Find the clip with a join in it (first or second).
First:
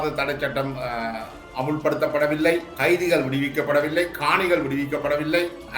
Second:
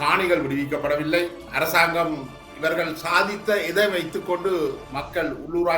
second